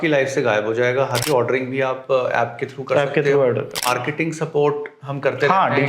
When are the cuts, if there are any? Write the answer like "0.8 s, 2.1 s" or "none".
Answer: 1.2 s, 3.9 s